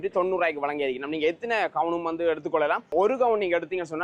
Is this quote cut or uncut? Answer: cut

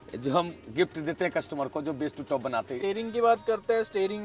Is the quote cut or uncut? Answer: cut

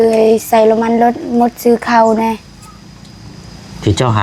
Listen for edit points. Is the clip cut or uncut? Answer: uncut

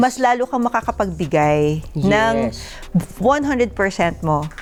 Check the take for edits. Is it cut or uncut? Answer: uncut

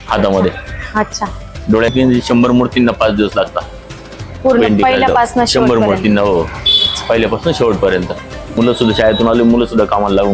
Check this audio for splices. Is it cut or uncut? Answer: cut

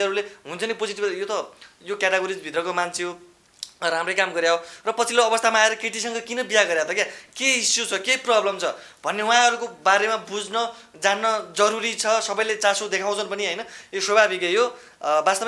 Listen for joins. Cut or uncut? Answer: uncut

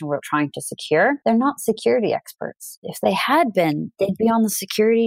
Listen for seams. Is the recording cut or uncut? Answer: cut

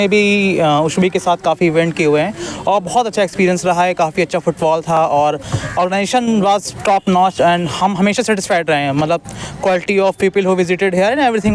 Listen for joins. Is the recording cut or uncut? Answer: uncut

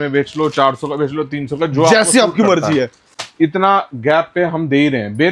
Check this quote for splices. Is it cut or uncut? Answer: uncut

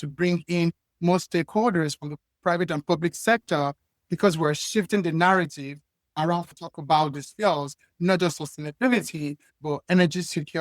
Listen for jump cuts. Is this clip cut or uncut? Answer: cut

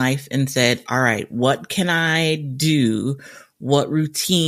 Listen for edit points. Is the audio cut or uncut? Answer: uncut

